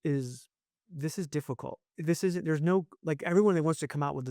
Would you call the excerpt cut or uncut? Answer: cut